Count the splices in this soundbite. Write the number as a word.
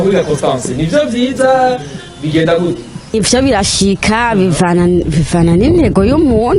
one